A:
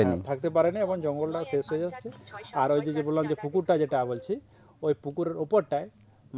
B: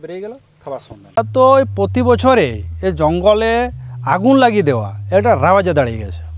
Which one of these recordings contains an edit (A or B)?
B